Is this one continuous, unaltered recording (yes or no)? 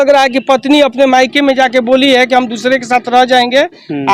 yes